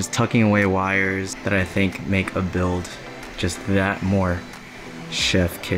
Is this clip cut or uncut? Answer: uncut